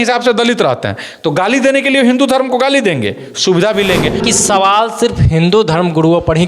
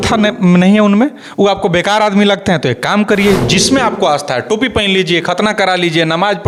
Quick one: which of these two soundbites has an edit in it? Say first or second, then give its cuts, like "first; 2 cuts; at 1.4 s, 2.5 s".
first; 1 cut; at 4.2 s